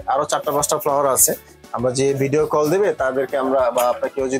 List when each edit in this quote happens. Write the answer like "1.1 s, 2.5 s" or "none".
none